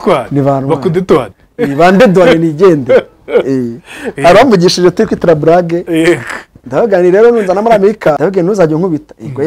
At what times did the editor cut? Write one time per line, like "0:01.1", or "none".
0:08.2